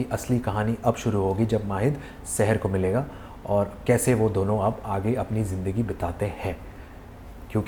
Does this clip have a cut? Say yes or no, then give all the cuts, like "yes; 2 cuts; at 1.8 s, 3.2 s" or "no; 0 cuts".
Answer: no; 0 cuts